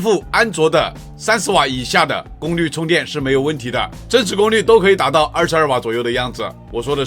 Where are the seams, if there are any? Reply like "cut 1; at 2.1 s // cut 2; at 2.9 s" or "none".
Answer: none